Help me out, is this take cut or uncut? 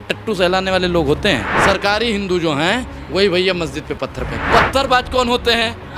cut